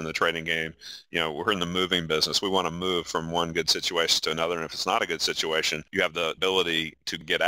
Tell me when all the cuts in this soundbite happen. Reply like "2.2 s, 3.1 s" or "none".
6.1 s

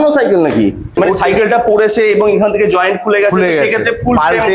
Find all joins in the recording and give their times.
0.9 s

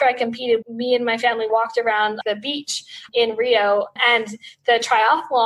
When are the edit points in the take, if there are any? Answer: 1.5 s

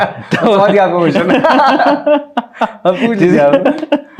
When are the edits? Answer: none

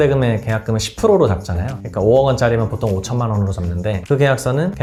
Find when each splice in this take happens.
none

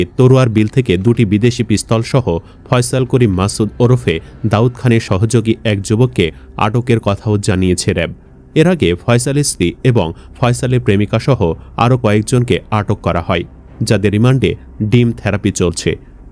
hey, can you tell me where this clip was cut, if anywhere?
none

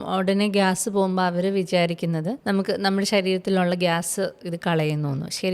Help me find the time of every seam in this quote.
2.4 s

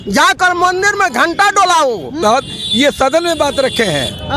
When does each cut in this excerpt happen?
2.2 s

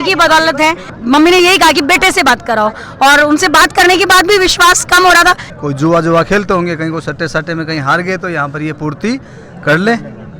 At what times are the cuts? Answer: 0.9 s, 5.5 s

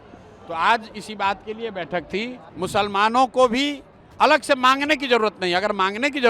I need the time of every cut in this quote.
2.4 s

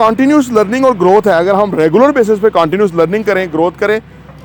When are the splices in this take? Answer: none

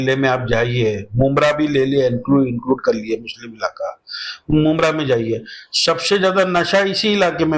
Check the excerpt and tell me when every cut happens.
none

